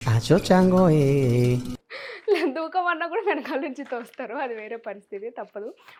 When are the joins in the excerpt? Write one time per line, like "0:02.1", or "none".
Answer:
none